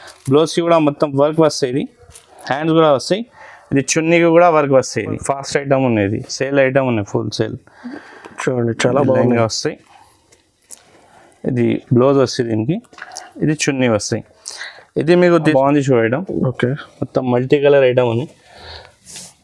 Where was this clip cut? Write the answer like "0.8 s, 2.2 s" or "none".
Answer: 5.2 s, 15.5 s